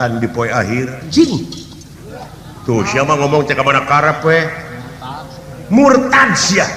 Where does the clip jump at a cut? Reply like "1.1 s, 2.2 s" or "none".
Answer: 1.1 s